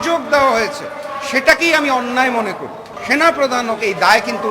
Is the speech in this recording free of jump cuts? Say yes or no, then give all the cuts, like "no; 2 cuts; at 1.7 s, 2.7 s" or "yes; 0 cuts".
no; 1 cut; at 3.0 s